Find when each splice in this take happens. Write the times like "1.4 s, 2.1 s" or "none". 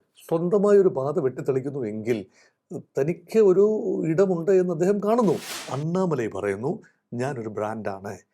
5.6 s